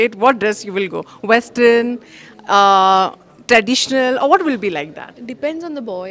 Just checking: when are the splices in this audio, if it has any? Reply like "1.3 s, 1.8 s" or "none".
none